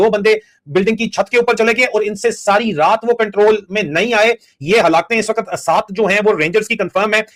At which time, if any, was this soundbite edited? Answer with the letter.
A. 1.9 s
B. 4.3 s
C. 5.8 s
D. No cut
D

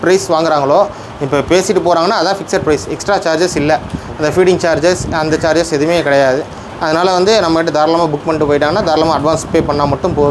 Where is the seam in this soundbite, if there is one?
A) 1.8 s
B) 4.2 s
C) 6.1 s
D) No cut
D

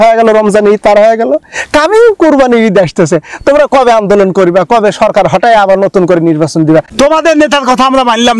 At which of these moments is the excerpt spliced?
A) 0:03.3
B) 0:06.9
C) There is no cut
B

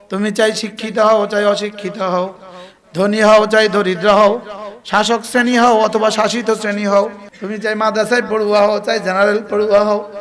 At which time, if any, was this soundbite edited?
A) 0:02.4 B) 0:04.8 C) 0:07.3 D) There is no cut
C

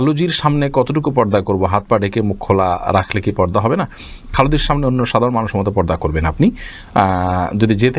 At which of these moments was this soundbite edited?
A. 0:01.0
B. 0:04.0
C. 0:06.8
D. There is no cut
D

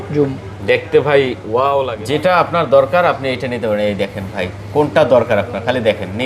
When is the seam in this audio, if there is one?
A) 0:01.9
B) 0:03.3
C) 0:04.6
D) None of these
A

